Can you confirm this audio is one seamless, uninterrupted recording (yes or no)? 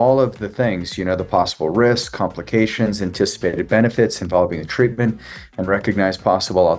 yes